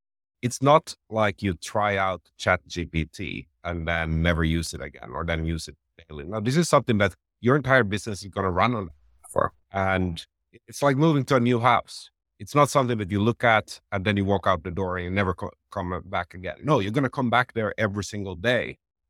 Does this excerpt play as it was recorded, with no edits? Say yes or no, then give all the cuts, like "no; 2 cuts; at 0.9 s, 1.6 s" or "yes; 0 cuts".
no; 1 cut; at 9.6 s